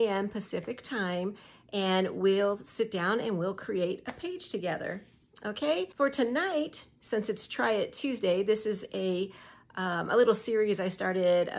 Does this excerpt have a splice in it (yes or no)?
yes